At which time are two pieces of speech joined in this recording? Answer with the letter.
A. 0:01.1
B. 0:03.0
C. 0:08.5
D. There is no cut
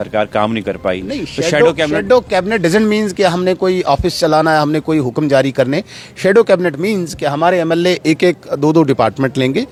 D